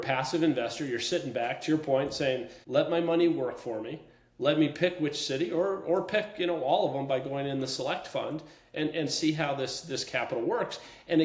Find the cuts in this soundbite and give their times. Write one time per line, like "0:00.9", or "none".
0:02.5